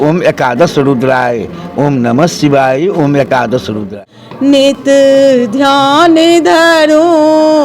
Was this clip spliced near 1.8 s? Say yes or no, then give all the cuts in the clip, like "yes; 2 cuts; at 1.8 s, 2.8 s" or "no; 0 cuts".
no; 1 cut; at 3.9 s